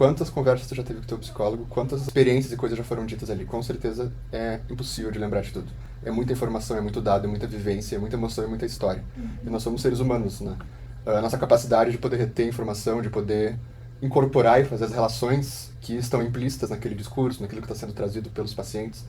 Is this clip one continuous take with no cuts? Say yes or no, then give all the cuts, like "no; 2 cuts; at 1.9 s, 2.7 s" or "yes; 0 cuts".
yes; 0 cuts